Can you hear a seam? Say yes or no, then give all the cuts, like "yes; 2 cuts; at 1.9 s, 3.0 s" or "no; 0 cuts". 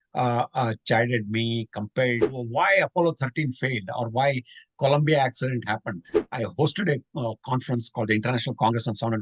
yes; 2 cuts; at 2.3 s, 6.2 s